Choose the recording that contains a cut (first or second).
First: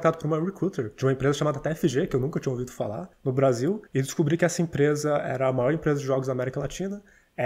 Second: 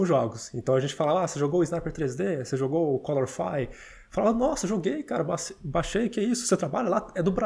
first